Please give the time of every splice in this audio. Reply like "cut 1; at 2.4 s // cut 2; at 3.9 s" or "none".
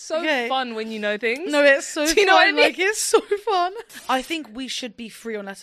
cut 1; at 3.9 s